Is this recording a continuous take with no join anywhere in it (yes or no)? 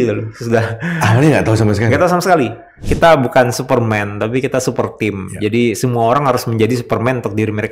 no